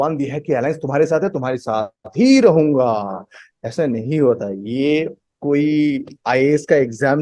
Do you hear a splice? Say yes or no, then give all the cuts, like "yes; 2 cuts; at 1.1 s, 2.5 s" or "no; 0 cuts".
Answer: no; 0 cuts